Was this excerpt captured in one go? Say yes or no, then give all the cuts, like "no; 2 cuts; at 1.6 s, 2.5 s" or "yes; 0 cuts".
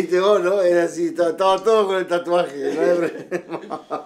yes; 0 cuts